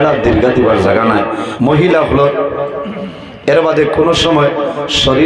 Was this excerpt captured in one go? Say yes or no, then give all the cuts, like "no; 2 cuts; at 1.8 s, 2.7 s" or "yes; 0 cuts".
no; 1 cut; at 1.4 s